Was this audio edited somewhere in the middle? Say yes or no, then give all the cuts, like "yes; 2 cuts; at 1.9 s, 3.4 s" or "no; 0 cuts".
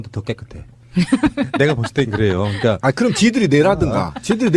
no; 0 cuts